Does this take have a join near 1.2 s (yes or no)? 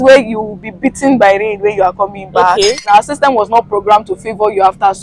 no